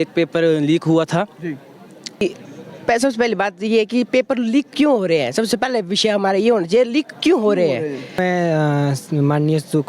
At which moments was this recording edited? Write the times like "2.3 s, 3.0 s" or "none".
2.2 s, 8.2 s